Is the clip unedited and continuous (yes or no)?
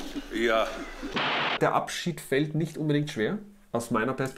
no